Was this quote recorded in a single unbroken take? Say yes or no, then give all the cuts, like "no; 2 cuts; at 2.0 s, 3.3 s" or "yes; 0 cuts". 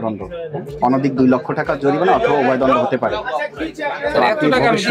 yes; 0 cuts